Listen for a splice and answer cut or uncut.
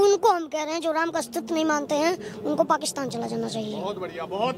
uncut